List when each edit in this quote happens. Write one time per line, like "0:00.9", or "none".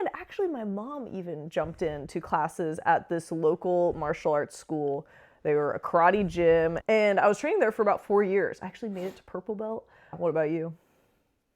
0:06.8
0:10.2